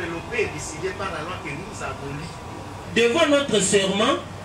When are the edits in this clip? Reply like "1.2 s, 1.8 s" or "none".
2.7 s